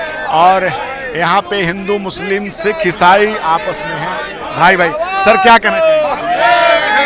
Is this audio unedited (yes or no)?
yes